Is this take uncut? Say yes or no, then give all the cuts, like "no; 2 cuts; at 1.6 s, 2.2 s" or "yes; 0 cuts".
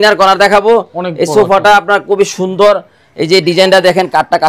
yes; 0 cuts